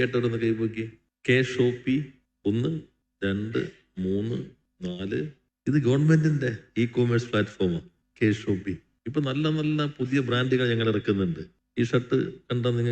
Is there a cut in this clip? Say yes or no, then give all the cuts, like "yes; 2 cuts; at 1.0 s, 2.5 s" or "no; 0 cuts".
no; 0 cuts